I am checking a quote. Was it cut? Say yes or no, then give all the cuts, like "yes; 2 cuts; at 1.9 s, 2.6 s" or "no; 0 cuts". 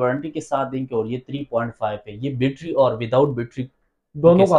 no; 0 cuts